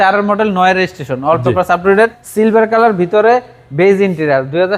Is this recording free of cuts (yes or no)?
no